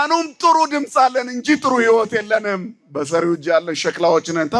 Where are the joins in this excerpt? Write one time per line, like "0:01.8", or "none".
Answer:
none